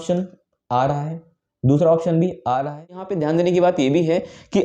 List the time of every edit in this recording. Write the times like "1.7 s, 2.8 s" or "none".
3.1 s